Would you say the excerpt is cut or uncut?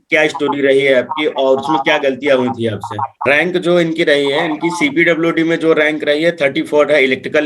cut